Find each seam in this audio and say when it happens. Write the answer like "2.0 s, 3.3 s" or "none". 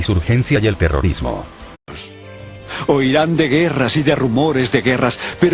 none